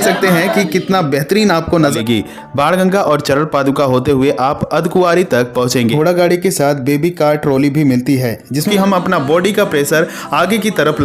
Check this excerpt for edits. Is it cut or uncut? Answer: cut